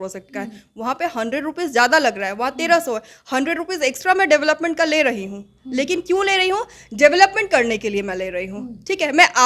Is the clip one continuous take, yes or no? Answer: yes